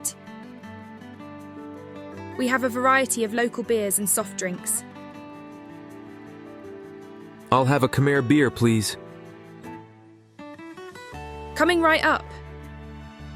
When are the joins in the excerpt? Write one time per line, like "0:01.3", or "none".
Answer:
0:12.2